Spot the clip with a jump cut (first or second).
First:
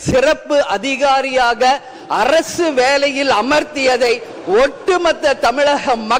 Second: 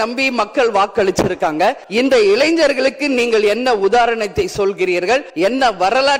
second